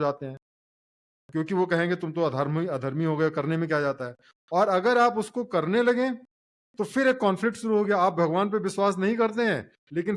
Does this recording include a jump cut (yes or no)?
no